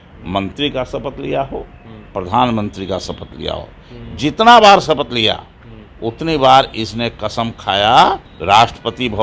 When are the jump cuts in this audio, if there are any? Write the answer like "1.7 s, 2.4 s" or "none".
8.3 s